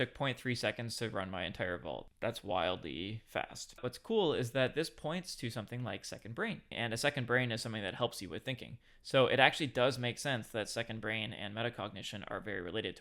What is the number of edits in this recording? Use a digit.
2